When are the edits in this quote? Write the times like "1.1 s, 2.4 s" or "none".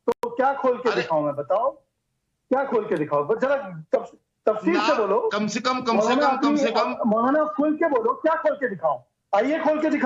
none